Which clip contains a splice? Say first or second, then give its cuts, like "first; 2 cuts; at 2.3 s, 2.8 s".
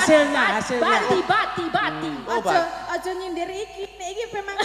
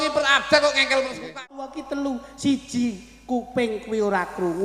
second; 1 cut; at 1.4 s